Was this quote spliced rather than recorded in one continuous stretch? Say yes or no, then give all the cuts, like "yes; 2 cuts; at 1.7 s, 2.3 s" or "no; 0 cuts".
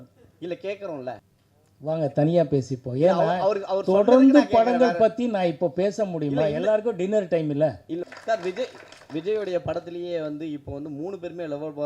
yes; 2 cuts; at 1.2 s, 8.1 s